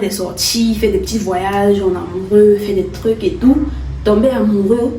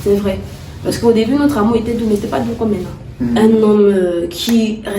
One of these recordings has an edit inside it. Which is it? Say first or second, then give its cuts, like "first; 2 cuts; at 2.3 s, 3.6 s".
second; 1 cut; at 3.4 s